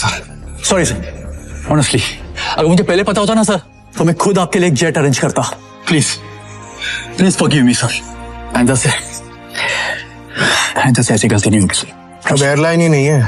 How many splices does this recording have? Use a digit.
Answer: 0